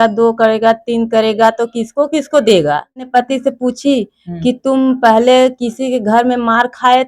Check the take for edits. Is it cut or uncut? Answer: cut